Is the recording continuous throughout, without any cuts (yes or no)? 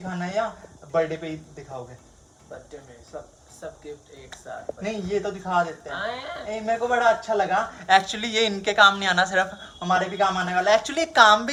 yes